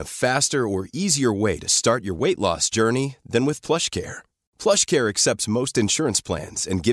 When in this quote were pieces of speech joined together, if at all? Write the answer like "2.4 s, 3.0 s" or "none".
none